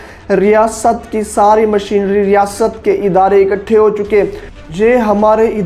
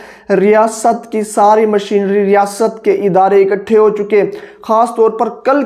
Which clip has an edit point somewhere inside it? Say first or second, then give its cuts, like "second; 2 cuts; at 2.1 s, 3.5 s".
first; 1 cut; at 4.6 s